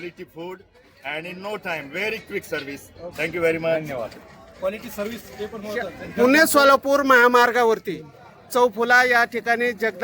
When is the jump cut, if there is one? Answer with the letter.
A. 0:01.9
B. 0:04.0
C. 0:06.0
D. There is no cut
C